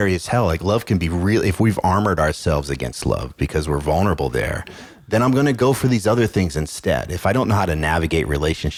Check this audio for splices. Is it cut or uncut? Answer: uncut